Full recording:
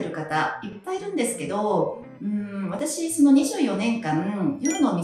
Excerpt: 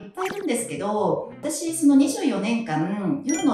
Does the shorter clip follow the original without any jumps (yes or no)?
no